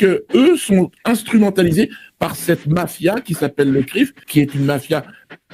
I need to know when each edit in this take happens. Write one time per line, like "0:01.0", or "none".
0:01.0
0:04.2

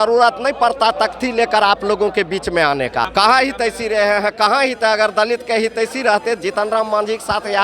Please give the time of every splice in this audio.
0:03.1

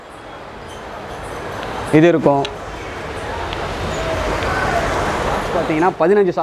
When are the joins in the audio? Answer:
0:05.5

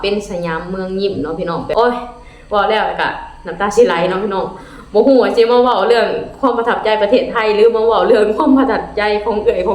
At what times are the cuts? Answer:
0:01.7

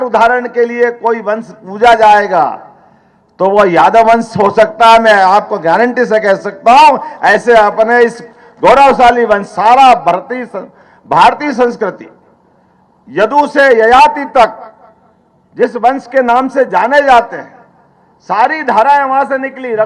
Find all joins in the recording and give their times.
none

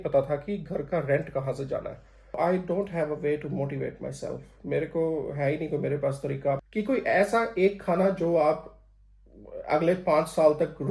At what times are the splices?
0:02.4
0:06.6

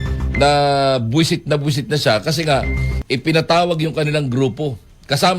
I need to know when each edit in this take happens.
0:02.9

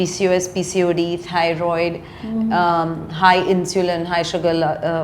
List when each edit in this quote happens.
none

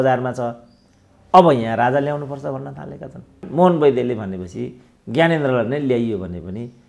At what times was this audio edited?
0:03.4

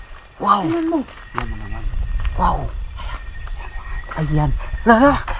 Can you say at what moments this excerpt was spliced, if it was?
none

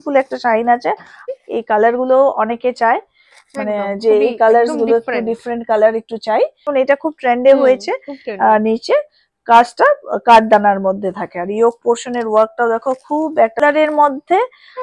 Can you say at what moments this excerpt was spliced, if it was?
0:01.2
0:06.7
0:13.6

